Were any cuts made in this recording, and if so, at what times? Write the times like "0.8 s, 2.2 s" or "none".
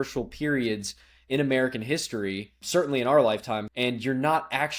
2.6 s, 3.7 s